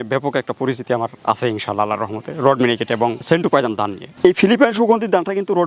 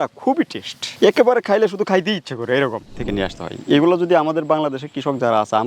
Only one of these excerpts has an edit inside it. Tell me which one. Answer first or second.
second